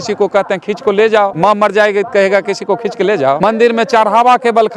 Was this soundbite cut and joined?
yes; 2 cuts; at 1.3 s, 3.4 s

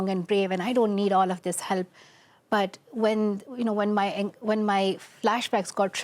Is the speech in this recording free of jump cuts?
yes; 0 cuts

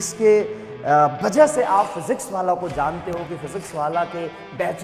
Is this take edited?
no; 0 cuts

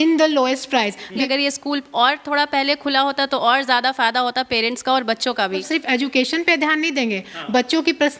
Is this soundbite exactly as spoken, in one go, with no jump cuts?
no; 2 cuts; at 1.2 s, 5.7 s

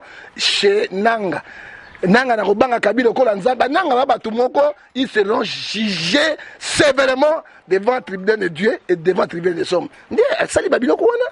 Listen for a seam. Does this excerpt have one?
no; 0 cuts

